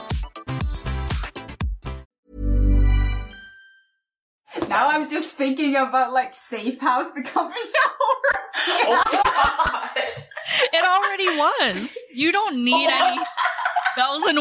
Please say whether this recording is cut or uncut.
cut